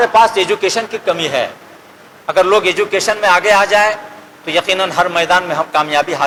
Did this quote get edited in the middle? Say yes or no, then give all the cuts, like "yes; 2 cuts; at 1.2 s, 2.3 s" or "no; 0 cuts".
no; 0 cuts